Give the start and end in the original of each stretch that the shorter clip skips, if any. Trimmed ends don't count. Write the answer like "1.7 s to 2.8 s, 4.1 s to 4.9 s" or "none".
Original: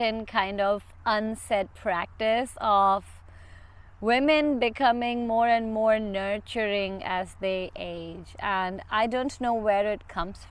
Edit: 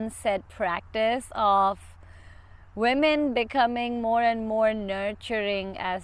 none